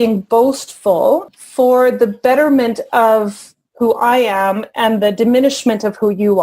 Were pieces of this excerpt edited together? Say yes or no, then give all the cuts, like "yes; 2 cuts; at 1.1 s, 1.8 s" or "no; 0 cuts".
yes; 1 cut; at 1.3 s